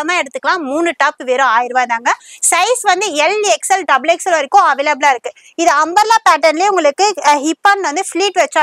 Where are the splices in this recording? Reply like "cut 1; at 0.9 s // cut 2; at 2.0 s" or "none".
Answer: none